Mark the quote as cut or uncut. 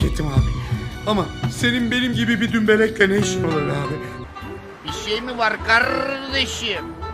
cut